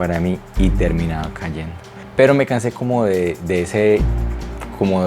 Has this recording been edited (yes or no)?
yes